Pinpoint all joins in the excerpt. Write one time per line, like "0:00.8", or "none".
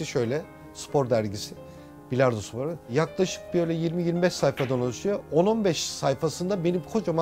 none